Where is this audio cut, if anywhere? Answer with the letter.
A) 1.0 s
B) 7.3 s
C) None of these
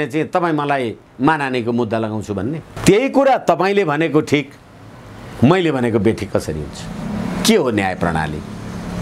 C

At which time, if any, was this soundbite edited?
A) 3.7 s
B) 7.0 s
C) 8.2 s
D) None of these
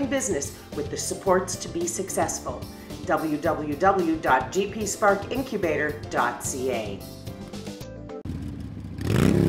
C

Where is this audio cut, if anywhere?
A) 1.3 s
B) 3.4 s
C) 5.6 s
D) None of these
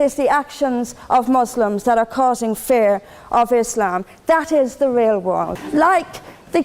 C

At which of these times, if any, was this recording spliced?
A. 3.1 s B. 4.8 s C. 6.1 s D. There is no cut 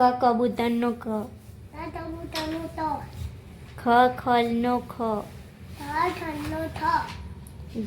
D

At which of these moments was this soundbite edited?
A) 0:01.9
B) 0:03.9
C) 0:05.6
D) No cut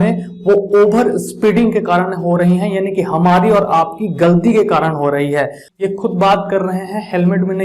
C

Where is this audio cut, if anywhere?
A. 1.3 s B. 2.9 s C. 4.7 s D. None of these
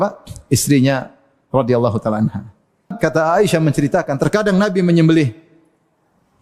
B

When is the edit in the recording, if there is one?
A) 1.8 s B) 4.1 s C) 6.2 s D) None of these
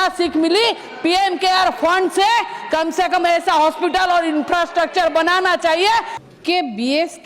C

